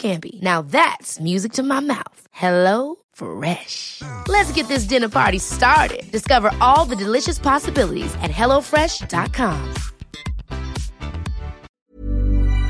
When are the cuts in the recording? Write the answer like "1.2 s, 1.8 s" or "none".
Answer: 11.7 s